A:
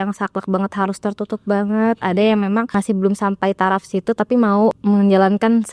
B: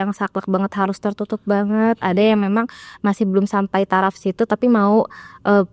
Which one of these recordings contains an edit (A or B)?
A